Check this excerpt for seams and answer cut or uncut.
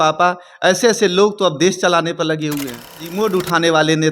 cut